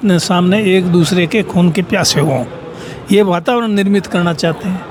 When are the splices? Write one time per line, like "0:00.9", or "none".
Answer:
none